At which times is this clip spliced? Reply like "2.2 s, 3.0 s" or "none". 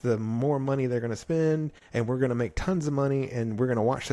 1.8 s